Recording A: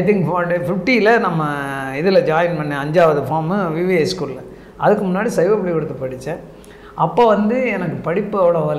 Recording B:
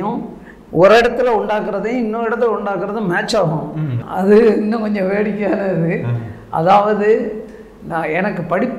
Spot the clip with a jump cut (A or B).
B